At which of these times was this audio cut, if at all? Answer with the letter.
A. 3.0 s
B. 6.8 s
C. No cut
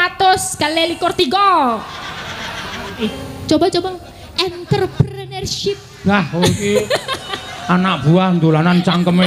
A